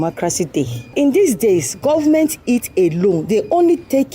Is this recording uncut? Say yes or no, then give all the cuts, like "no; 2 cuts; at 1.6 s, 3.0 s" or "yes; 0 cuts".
no; 1 cut; at 0.9 s